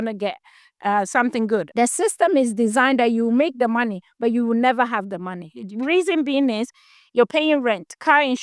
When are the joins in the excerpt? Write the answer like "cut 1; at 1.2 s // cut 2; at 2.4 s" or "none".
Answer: cut 1; at 1.7 s